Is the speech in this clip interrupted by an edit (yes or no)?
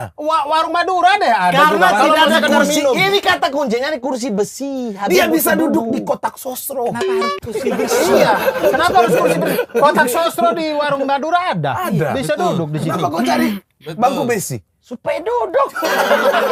no